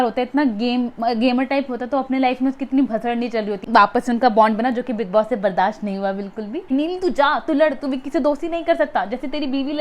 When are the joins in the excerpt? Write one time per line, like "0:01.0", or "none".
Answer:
0:03.6
0:06.7